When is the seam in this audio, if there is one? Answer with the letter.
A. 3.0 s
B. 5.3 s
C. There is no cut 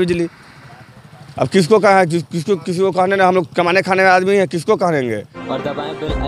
B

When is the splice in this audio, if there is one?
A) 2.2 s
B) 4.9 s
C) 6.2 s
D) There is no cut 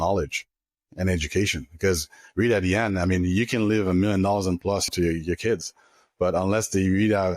B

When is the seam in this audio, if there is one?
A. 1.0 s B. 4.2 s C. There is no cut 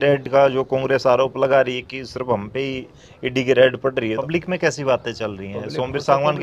B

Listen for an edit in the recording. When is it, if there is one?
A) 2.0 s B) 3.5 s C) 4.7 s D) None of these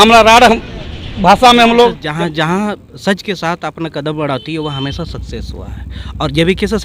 A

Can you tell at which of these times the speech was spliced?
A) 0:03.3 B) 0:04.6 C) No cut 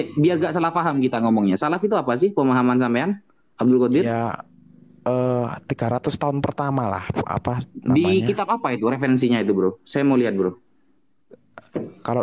C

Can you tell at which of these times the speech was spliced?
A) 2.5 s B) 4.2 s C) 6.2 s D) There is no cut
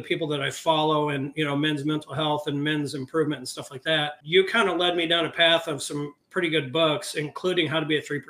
B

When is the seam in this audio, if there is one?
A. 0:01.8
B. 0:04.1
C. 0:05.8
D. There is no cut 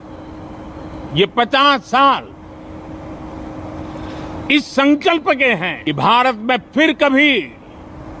C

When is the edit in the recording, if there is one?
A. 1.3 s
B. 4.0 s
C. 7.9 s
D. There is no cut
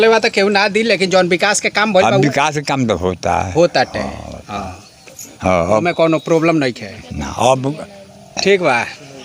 D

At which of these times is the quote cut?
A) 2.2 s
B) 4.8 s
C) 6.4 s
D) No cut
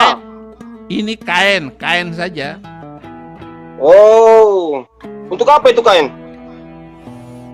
D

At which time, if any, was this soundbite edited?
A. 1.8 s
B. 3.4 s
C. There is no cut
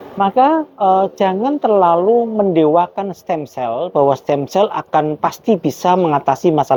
C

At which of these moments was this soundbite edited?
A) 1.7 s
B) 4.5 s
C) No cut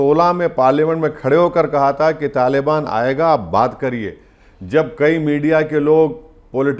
C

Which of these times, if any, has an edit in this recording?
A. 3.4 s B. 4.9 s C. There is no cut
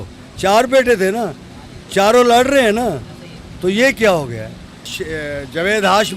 B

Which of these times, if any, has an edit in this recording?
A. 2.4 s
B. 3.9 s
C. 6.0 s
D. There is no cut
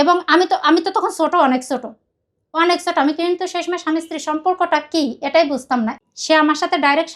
C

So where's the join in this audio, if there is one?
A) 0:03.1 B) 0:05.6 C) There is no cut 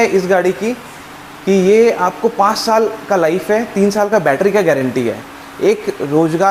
C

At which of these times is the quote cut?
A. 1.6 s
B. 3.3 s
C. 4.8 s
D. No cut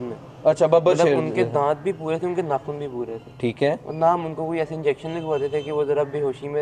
D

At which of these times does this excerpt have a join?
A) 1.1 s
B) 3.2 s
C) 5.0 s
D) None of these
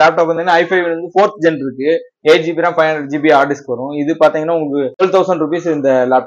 C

